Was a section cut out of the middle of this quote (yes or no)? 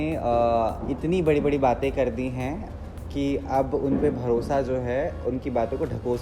no